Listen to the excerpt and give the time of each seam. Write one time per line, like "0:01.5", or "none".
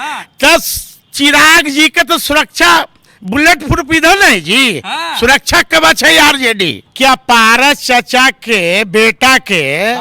0:06.8